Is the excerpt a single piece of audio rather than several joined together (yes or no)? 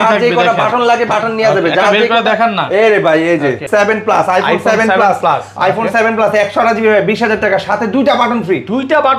no